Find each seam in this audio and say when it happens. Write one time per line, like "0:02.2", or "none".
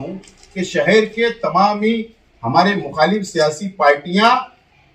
none

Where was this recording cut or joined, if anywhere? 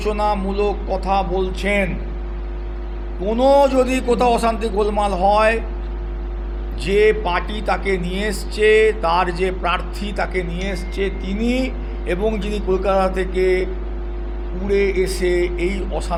none

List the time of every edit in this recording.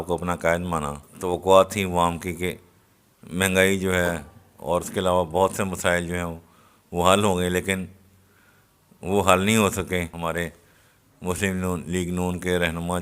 0:01.1
0:10.1

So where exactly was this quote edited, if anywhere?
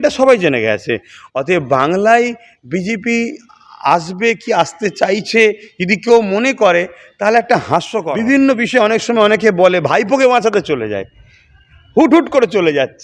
0:08.0

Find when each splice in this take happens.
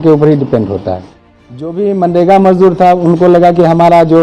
0:01.8

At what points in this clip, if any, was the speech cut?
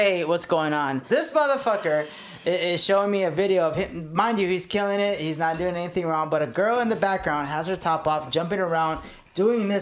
0:01.1

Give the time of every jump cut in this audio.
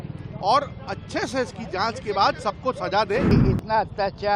0:03.3

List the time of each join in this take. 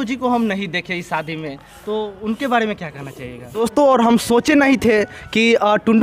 0:03.4

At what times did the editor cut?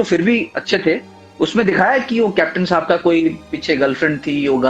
0:01.2

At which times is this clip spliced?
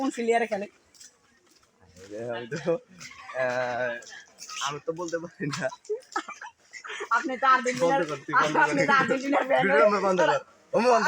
none

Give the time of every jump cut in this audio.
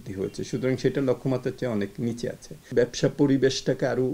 0:02.6

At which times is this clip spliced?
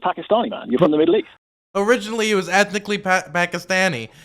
0:01.3

